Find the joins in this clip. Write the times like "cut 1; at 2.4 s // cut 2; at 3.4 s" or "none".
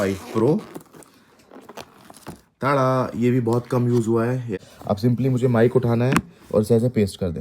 cut 1; at 4.6 s